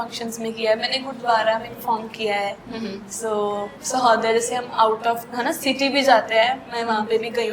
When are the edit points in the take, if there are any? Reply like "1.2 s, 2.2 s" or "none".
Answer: none